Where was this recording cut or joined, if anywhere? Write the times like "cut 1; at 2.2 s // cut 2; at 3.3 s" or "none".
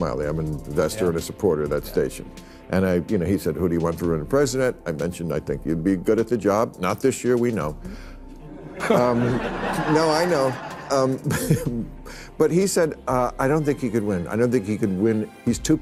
none